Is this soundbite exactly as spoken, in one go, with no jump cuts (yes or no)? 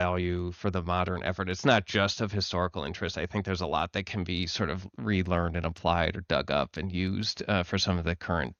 yes